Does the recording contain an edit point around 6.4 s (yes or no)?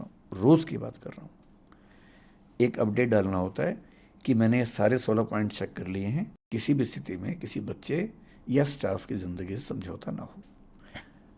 yes